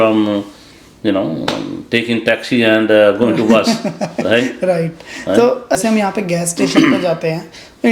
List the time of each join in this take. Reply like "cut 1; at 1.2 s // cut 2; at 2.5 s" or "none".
none